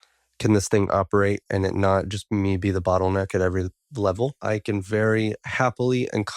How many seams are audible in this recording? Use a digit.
1